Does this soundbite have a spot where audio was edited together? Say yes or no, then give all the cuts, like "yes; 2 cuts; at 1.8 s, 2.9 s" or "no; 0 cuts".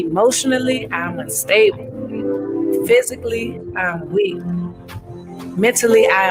no; 0 cuts